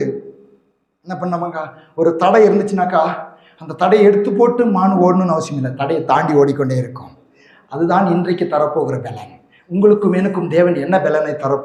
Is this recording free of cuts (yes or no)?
yes